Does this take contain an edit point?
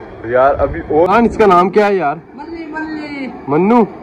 yes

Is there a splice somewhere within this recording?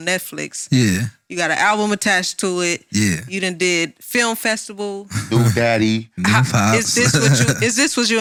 no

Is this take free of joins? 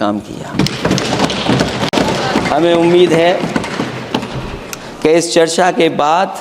no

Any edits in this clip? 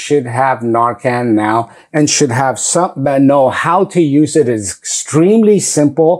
no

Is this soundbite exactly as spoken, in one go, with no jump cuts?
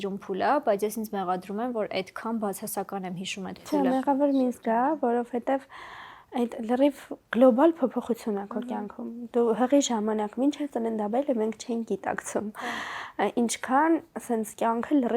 yes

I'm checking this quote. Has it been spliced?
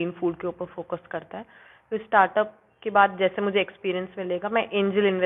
no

